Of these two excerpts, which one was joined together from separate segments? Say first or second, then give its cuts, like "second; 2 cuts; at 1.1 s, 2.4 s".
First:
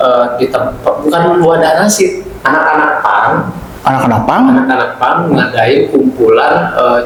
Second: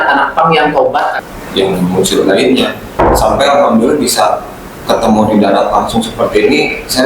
second; 1 cut; at 1.3 s